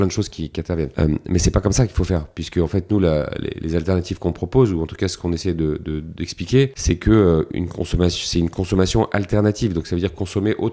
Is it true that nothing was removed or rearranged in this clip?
no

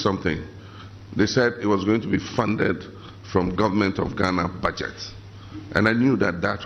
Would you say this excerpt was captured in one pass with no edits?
yes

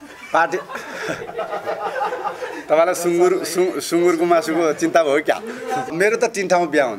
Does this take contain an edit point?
yes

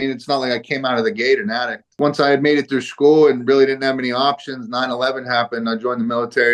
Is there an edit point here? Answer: yes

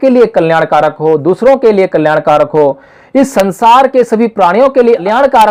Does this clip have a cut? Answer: no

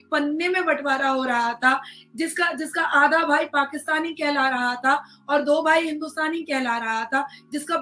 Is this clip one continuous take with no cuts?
yes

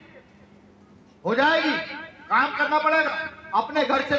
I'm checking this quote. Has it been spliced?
no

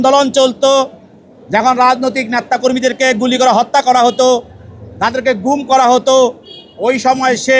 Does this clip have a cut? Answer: no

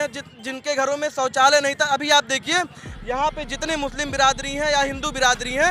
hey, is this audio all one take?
yes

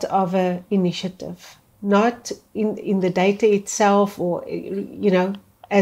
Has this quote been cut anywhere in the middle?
no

